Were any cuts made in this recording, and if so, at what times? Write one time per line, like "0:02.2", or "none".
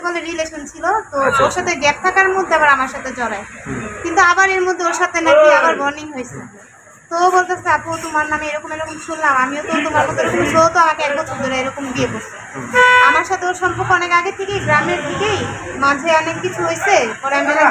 none